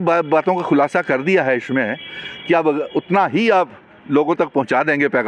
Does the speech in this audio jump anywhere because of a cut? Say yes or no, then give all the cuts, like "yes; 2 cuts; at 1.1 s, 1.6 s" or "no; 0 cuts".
no; 0 cuts